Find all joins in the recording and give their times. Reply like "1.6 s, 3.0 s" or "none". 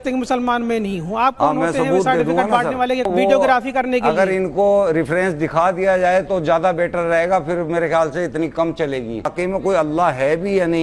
3.1 s, 9.3 s